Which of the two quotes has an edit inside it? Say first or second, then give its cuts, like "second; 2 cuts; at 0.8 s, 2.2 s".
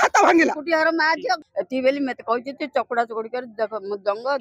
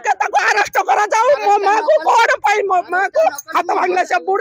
first; 1 cut; at 1.4 s